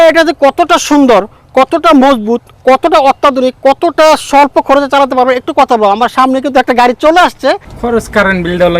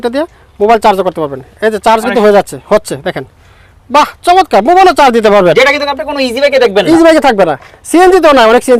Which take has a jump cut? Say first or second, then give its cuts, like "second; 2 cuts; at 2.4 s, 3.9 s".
first; 1 cut; at 7.7 s